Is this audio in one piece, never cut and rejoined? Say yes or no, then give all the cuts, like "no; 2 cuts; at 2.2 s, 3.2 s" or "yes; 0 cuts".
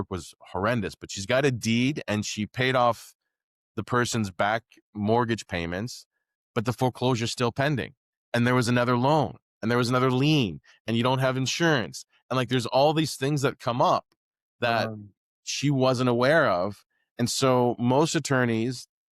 yes; 0 cuts